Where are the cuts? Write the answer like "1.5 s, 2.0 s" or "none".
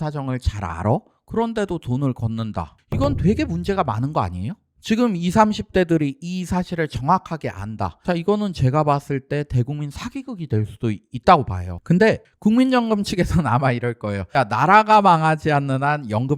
none